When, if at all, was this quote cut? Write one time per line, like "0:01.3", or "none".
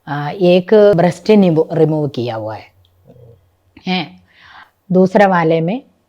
0:00.9